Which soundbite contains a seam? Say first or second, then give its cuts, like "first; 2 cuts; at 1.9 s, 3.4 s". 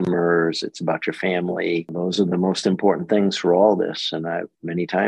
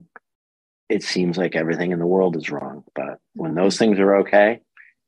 first; 1 cut; at 1.9 s